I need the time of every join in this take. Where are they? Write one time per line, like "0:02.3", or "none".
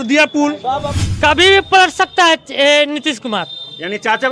0:00.9